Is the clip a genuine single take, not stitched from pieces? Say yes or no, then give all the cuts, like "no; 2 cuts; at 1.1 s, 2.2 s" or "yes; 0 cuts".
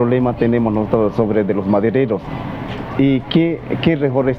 yes; 0 cuts